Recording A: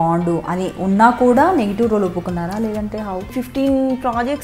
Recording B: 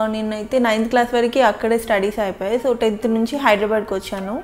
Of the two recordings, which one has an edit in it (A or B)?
A